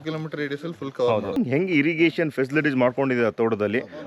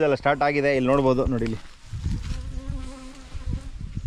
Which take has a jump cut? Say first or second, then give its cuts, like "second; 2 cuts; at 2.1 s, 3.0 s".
first; 1 cut; at 1.4 s